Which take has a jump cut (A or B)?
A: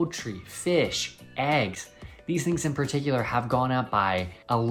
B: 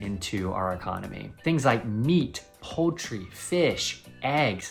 B